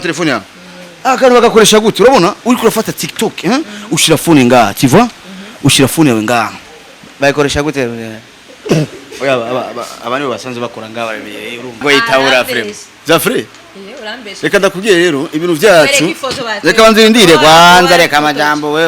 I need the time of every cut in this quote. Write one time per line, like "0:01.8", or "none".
0:11.8